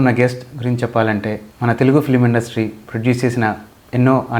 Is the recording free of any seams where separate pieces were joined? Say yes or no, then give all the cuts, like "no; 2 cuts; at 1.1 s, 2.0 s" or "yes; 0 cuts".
no; 1 cut; at 1.5 s